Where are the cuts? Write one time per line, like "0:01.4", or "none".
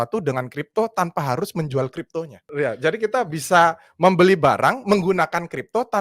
0:02.4